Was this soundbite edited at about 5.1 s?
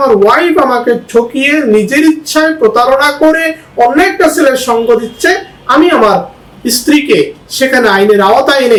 no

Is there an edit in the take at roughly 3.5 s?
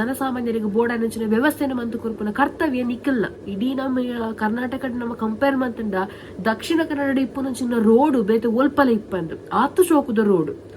yes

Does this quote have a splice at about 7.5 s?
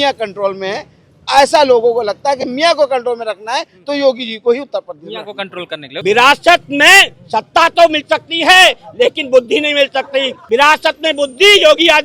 no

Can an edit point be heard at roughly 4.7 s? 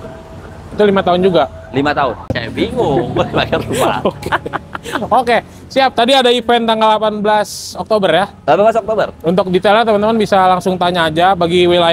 no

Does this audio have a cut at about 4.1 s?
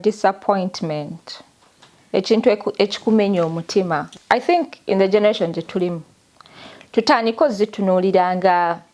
yes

